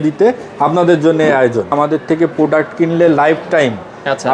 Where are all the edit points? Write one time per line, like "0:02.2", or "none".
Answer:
0:01.7